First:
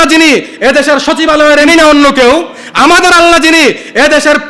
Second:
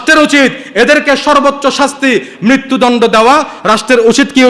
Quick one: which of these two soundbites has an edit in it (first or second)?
first